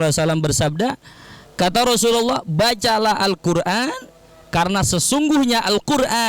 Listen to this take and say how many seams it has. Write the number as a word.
zero